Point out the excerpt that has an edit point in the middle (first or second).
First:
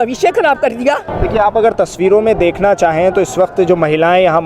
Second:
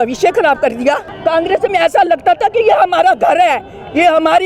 second